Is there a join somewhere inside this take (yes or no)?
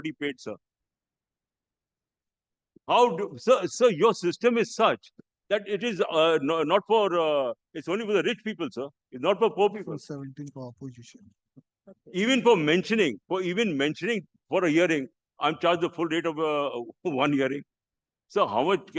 no